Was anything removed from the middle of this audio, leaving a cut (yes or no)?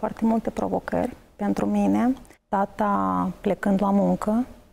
yes